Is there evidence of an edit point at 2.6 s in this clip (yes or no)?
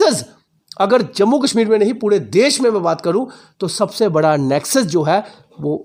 no